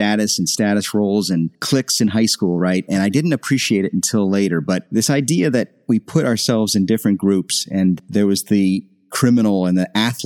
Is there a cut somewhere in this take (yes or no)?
no